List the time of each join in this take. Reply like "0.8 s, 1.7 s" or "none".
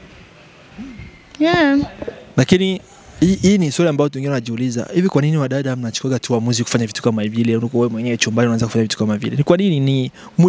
none